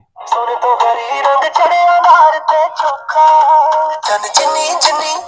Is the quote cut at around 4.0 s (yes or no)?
yes